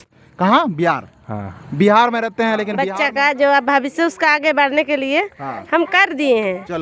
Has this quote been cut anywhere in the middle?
yes; 1 cut; at 2.7 s

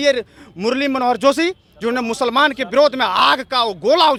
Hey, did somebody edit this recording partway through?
no; 0 cuts

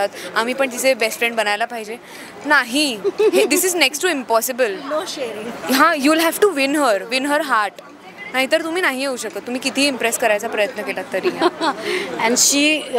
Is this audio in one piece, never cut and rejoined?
yes; 0 cuts

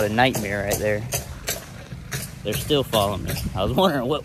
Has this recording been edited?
no; 0 cuts

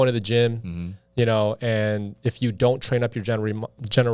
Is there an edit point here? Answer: no; 0 cuts

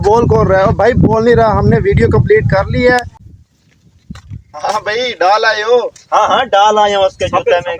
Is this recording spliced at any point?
yes; 1 cut; at 3.4 s

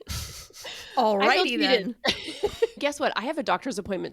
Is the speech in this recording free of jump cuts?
no; 1 cut; at 2.8 s

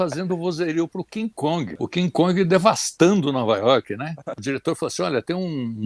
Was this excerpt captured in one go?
no; 2 cuts; at 1.7 s, 4.4 s

